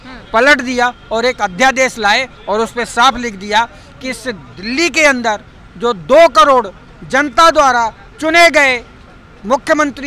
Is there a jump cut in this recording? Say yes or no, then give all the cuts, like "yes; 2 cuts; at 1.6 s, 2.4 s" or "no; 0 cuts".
no; 0 cuts